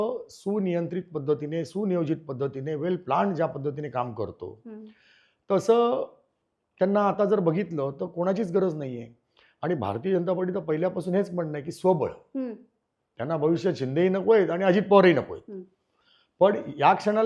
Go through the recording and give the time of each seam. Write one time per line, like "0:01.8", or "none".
none